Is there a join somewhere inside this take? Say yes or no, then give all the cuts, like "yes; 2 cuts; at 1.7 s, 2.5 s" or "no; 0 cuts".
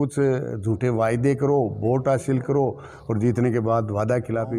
no; 0 cuts